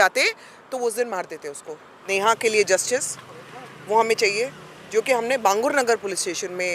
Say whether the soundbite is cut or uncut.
cut